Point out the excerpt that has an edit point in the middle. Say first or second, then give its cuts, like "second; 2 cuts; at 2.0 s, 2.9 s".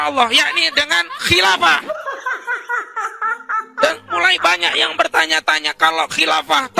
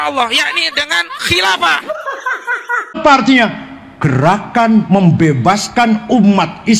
second; 1 cut; at 3.0 s